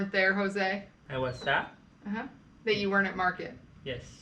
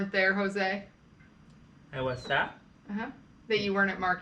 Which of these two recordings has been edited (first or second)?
first